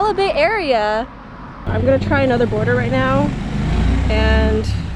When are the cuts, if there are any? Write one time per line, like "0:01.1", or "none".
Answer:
0:01.7